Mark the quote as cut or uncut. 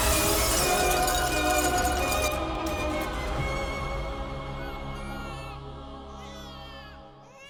uncut